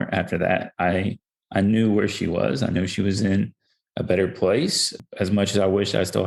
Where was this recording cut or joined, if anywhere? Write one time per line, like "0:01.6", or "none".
0:05.0